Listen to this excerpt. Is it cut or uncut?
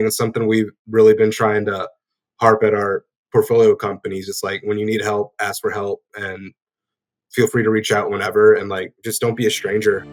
uncut